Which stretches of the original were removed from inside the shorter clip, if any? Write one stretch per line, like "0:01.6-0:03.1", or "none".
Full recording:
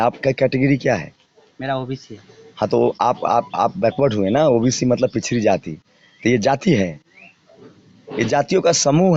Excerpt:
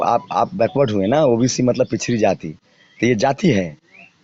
none

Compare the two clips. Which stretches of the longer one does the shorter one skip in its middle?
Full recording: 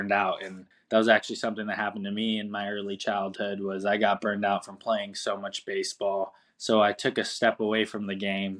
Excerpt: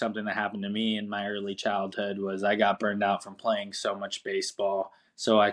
none

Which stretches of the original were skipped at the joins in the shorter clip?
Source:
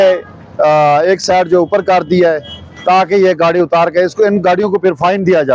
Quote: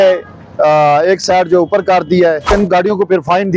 0:02.5-0:04.3

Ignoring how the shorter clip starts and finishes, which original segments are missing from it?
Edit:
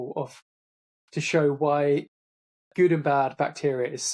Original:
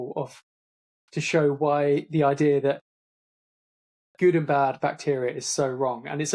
0:02.1-0:03.5

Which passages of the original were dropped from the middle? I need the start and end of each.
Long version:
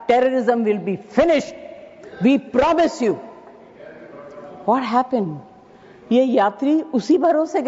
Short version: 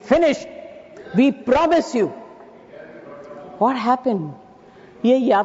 none

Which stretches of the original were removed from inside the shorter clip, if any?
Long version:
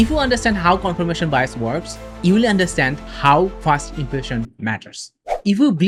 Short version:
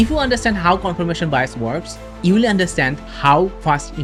none

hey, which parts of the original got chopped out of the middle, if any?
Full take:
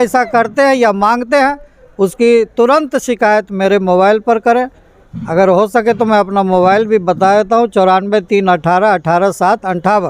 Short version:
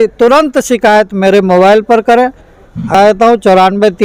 0:05.3-0:07.2

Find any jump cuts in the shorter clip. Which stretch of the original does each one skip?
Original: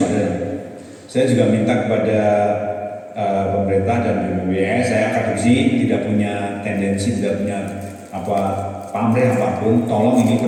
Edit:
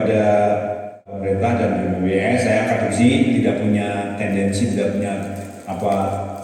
0:03.1-0:03.6

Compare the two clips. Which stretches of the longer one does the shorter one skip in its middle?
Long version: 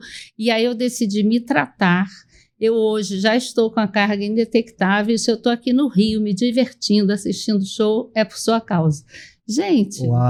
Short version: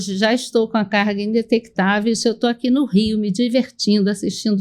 none

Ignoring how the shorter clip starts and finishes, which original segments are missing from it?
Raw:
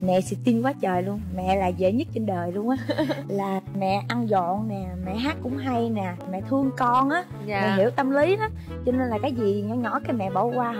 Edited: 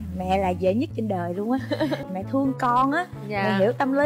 0:03.2-0:06.2

